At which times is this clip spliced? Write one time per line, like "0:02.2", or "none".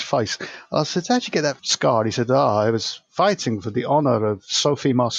0:01.7